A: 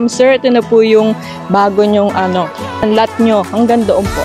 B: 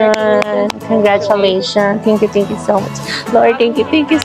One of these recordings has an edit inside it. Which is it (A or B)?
A